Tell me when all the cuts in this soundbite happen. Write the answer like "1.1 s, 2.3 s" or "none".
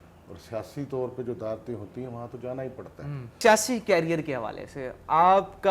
3.3 s

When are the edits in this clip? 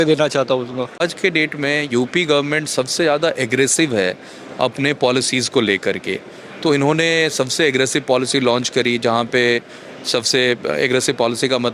1.1 s

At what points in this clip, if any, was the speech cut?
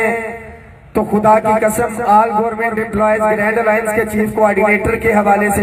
none

